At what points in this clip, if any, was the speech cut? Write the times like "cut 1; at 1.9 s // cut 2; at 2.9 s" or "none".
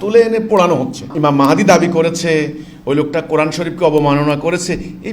cut 1; at 1.1 s

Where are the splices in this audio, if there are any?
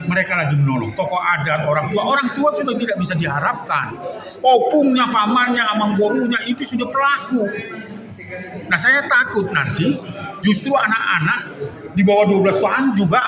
none

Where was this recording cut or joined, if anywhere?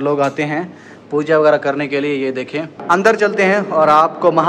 cut 1; at 2.8 s

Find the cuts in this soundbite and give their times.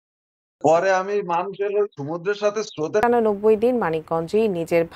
cut 1; at 3.0 s

